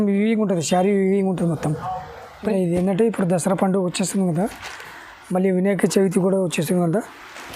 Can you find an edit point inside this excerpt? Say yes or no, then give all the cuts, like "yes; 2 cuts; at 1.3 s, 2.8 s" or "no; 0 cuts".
yes; 1 cut; at 2.5 s